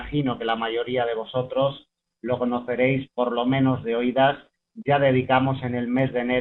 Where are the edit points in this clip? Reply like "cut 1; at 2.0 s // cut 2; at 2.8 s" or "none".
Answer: none

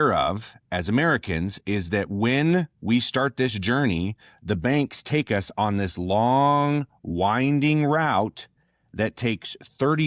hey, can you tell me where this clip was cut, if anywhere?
none

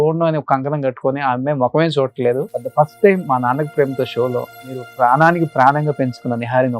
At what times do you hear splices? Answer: cut 1; at 2.6 s // cut 2; at 4.9 s

